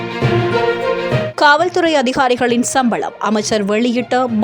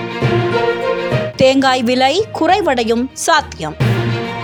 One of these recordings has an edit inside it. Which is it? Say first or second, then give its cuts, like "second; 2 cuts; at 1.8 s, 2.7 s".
first; 1 cut; at 1.3 s